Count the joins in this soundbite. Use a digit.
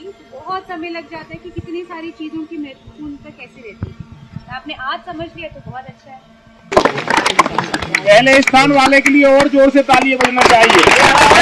1